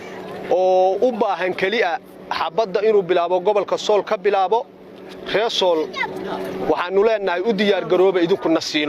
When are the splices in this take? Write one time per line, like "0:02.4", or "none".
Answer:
0:06.1